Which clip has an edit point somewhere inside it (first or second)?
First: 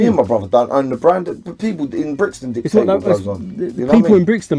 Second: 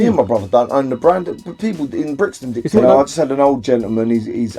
second